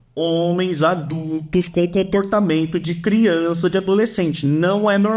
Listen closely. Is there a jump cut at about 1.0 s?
no; 0 cuts

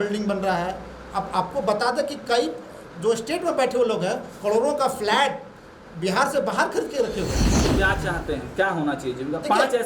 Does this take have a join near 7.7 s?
yes; 1 cut; at 7.7 s

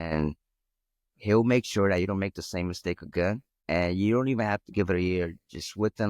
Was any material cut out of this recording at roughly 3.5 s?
yes; 1 cut; at 3.5 s

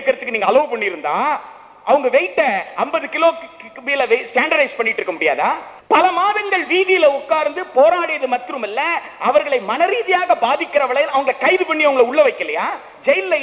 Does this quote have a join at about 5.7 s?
yes; 1 cut; at 5.7 s

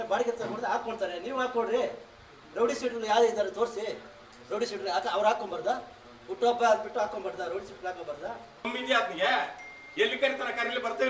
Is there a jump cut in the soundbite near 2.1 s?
no; 1 cut; at 8.7 s

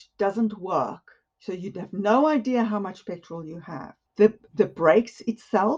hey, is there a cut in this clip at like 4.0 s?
yes; 1 cut; at 4.0 s

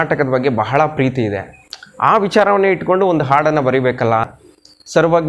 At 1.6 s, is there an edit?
no; 1 cut; at 4.3 s

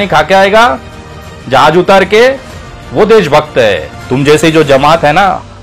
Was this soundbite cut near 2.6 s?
no; 1 cut; at 3.9 s

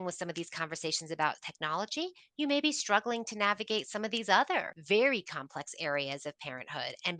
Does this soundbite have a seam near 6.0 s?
no; 1 cut; at 4.7 s

